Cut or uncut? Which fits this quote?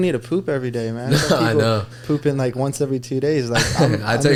uncut